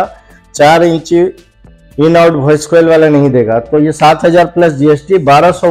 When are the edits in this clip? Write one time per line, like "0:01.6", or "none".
none